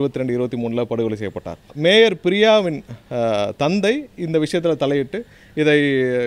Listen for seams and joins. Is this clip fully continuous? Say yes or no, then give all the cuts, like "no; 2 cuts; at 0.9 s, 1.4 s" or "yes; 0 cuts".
no; 1 cut; at 1.7 s